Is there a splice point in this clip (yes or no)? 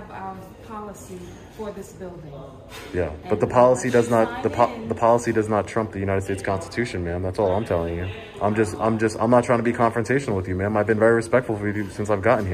no